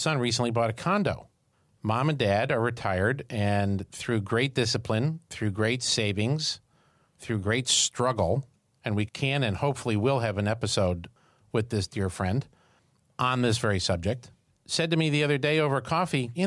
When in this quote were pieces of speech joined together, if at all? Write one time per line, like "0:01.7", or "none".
0:09.1